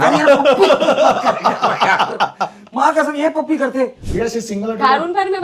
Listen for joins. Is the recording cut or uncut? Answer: cut